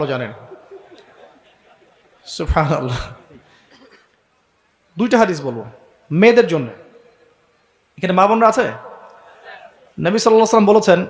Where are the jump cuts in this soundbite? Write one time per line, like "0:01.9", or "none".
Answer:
0:03.7